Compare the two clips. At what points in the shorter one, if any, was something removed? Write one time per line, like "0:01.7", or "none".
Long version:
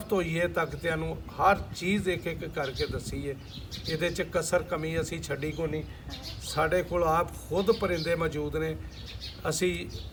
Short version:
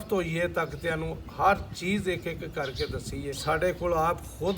0:03.4